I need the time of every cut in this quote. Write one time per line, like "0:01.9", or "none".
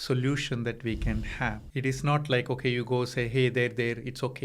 0:01.6